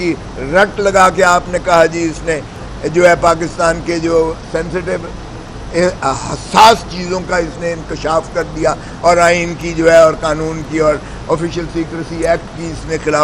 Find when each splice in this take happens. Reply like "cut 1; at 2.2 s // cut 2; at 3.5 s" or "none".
none